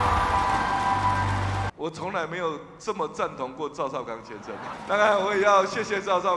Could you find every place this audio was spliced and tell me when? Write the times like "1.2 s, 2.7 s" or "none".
1.7 s, 4.7 s